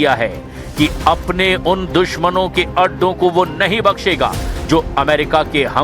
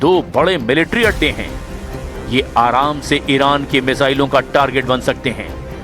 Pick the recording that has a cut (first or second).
first